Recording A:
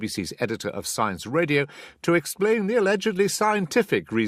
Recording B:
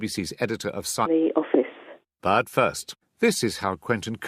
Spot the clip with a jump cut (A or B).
A